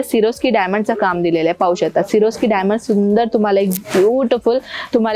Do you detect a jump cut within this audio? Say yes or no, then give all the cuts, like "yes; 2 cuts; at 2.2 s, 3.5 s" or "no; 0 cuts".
no; 0 cuts